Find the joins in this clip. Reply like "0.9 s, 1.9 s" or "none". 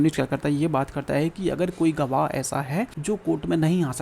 3.0 s

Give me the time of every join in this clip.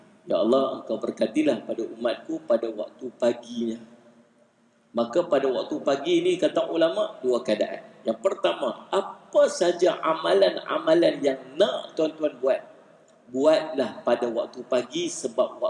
none

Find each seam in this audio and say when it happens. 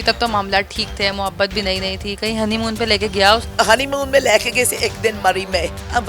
3.5 s

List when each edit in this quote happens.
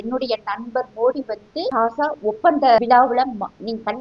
1.7 s, 2.8 s

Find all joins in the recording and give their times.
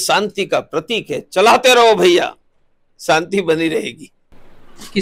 none

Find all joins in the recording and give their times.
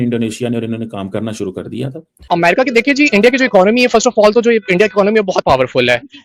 2.1 s

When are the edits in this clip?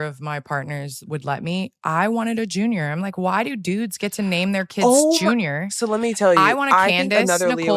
none

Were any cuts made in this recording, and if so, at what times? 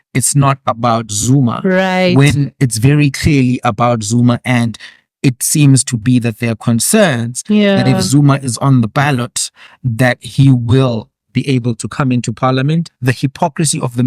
12.8 s

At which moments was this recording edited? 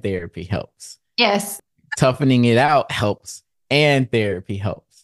1.5 s

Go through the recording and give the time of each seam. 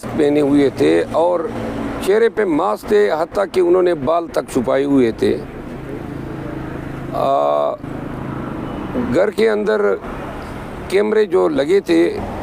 none

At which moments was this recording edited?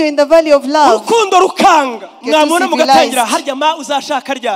2.1 s

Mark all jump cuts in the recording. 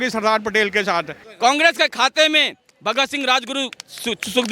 1.2 s

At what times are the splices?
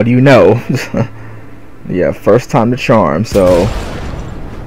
3.3 s

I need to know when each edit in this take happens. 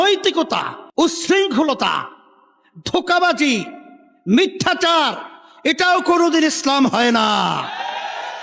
none

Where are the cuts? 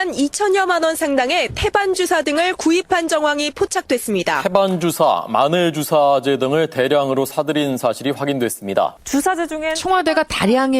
3.1 s

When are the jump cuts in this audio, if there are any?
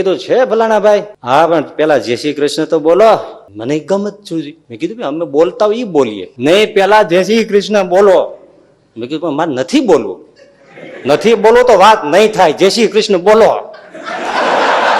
1.1 s, 3.4 s, 4.6 s, 6.2 s

